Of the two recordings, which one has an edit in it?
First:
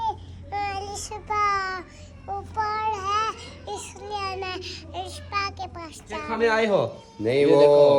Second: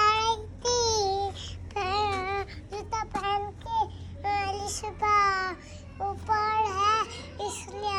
first; 1 cut; at 6.3 s

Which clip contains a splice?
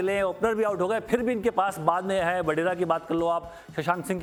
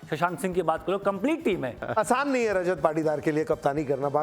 second; 1 cut; at 1.8 s

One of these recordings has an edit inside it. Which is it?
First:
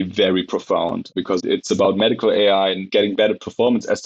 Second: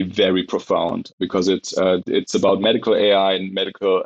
first; 2 cuts; at 1.3 s, 2.8 s

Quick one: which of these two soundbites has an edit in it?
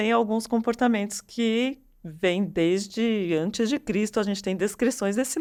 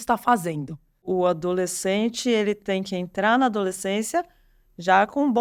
second; 1 cut; at 1.0 s

